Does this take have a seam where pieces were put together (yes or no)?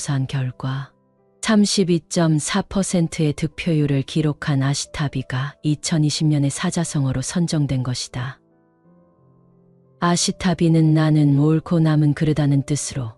yes